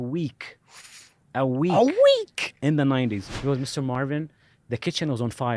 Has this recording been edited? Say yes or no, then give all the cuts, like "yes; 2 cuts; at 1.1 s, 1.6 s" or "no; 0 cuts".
yes; 1 cut; at 3.3 s